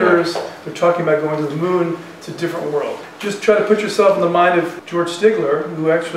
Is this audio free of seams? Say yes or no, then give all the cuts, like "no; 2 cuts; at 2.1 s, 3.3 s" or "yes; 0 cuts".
no; 2 cuts; at 3.1 s, 4.7 s